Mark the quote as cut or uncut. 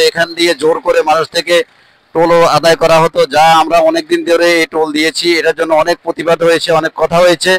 uncut